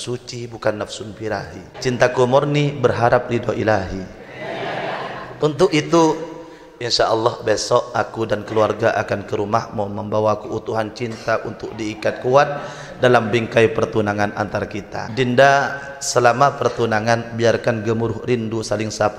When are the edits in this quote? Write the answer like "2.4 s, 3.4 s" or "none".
1.6 s, 5.3 s, 15.0 s